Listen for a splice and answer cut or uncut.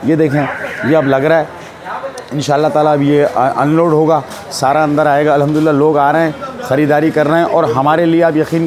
uncut